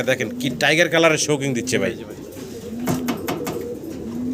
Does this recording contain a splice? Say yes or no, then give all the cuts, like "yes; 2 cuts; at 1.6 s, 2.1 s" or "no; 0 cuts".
no; 0 cuts